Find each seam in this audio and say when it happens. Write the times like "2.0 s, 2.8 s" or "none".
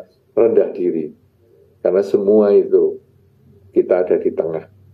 none